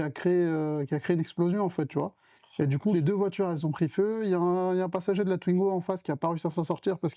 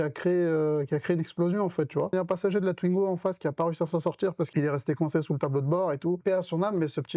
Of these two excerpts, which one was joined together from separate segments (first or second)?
second